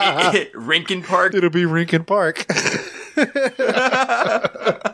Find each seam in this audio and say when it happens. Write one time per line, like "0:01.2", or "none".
0:01.3